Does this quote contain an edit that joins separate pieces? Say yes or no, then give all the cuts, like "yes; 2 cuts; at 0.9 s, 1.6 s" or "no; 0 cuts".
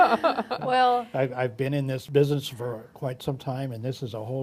yes; 1 cut; at 2.0 s